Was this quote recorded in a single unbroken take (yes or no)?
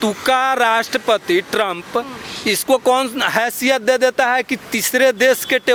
yes